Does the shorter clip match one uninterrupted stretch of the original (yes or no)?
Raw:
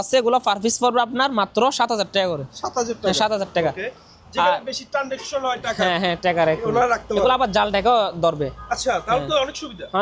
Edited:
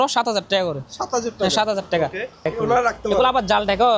no